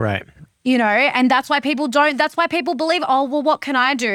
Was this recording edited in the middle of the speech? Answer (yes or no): no